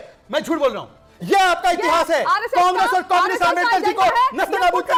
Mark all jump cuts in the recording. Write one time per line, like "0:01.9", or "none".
none